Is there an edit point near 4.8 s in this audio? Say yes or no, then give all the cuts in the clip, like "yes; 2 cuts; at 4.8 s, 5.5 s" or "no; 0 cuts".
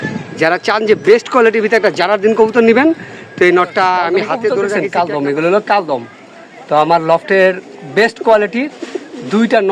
yes; 1 cut; at 4.8 s